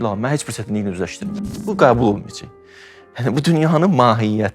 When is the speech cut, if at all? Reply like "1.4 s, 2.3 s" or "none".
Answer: 1.6 s